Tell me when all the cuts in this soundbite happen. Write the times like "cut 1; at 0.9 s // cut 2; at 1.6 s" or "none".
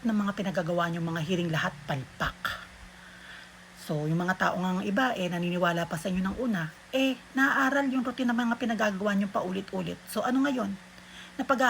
none

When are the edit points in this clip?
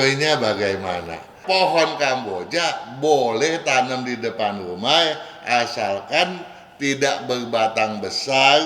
cut 1; at 1.4 s

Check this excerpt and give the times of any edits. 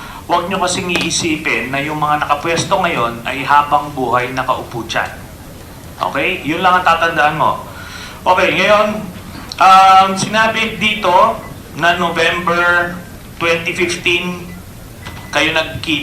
cut 1; at 1.7 s

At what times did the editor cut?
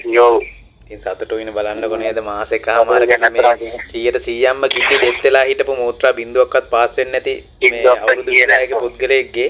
none

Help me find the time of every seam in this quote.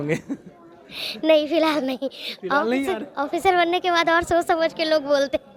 none

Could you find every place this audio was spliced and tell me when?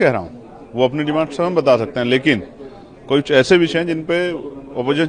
none

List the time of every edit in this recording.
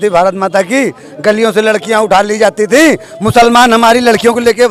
none

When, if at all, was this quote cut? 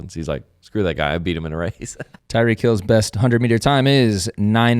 cut 1; at 2.1 s

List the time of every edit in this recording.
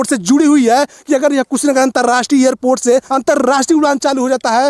cut 1; at 3.1 s

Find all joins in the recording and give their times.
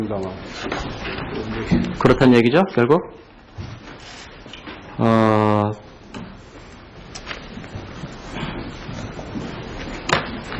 none

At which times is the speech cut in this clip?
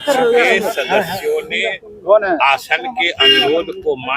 none

